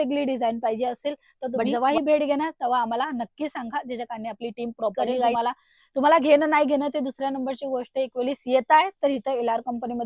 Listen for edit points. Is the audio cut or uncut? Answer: cut